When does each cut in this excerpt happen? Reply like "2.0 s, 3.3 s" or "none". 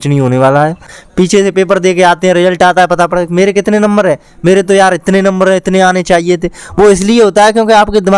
1.0 s